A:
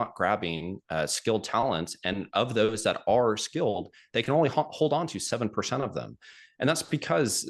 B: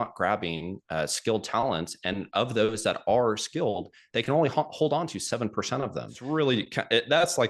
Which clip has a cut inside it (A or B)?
B